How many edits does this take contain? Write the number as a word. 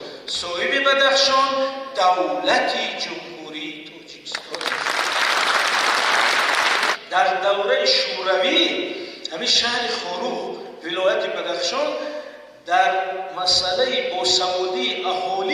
one